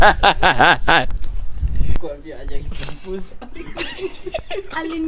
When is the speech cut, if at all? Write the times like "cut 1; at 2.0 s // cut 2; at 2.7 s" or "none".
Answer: cut 1; at 1.9 s

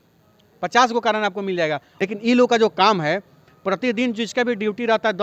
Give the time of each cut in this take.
cut 1; at 1.9 s

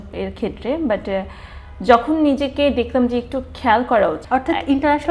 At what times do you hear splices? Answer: cut 1; at 4.2 s

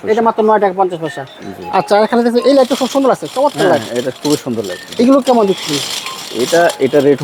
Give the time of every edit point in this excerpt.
none

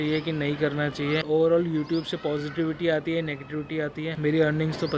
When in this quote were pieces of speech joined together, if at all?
cut 1; at 1.2 s // cut 2; at 4.1 s

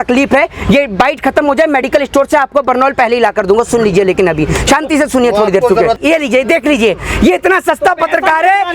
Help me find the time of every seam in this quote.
cut 1; at 6.0 s

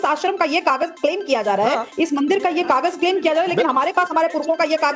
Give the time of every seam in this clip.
none

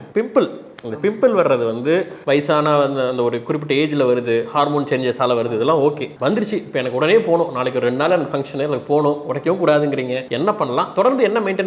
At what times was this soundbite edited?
none

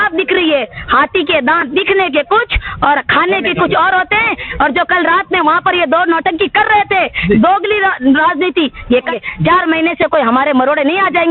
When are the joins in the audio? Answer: cut 1; at 9.1 s

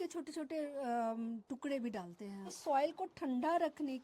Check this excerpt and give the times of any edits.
cut 1; at 2.3 s

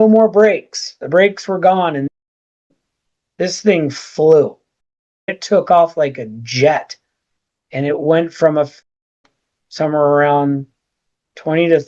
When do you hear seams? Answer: none

